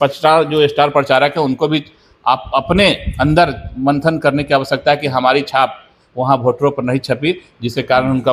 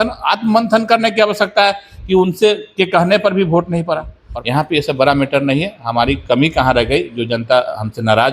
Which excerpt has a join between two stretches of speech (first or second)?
second